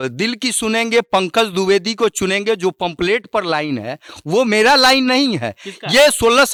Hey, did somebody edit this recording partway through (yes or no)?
no